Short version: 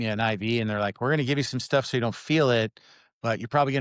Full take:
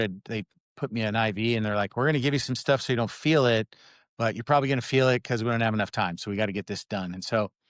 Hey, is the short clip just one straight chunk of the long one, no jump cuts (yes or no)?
yes